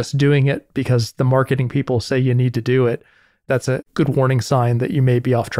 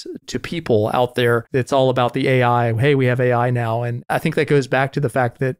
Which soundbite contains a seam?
second; 2 cuts; at 1.4 s, 4.0 s

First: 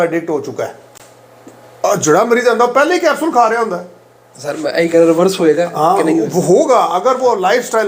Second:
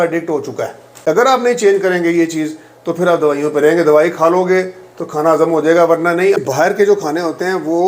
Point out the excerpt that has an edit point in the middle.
second; 2 cuts; at 0.9 s, 6.4 s

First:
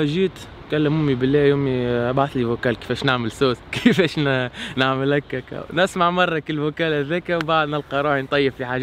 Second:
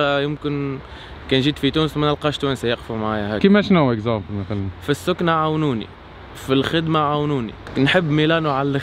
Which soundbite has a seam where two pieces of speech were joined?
second; 1 cut; at 7.6 s

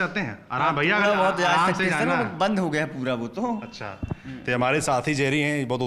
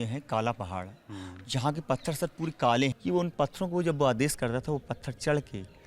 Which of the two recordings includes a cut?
second; 1 cut; at 3.0 s

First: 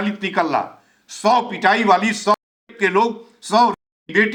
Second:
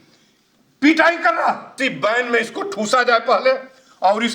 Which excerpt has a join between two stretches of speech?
second; 1 cut; at 1.7 s

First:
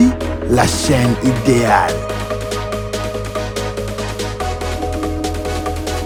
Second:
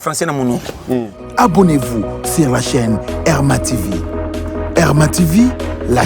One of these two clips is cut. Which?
second; 1 cut; at 1.2 s

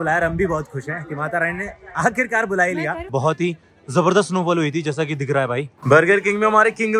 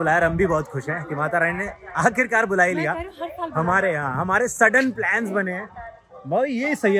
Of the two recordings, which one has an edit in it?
first; 2 cuts; at 3.0 s, 5.7 s

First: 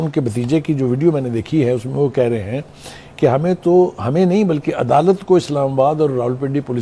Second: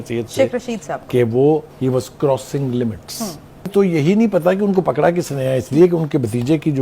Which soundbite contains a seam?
second; 1 cut; at 3.7 s

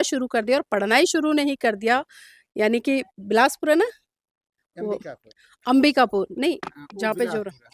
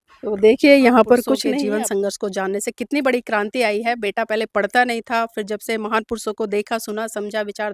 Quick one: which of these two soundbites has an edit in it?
second; 1 cut; at 1.5 s

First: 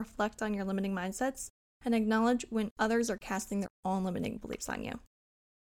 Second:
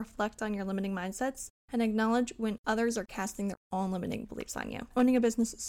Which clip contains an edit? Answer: second; 2 cuts; at 1.5 s, 4.9 s

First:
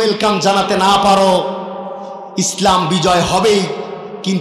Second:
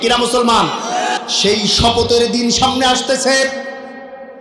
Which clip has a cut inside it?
second; 1 cut; at 1.3 s

